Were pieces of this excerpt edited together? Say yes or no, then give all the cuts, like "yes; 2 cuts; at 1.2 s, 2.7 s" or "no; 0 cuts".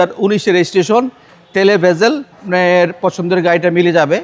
yes; 1 cut; at 2.4 s